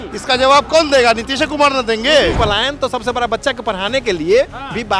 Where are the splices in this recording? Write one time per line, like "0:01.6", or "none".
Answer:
0:02.4